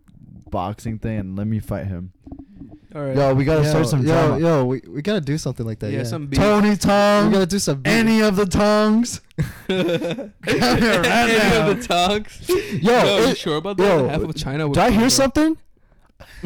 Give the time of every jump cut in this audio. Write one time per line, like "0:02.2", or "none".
none